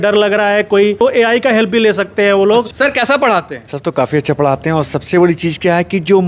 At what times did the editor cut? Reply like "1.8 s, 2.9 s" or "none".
1.0 s, 2.7 s